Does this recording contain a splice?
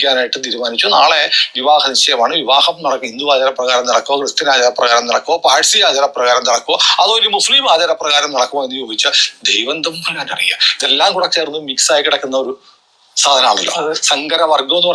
no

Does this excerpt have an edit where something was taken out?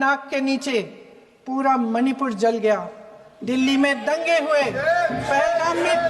no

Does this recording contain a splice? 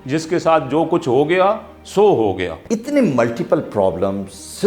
yes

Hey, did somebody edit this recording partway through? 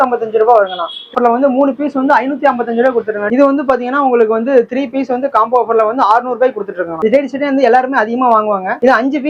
yes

